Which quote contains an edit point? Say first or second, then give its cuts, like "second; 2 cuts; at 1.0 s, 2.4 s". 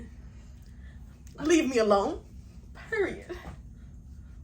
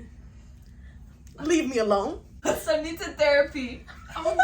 second; 1 cut; at 2.3 s